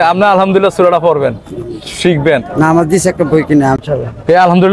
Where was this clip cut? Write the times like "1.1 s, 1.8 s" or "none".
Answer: 3.7 s